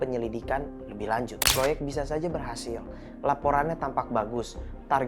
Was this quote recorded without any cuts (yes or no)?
no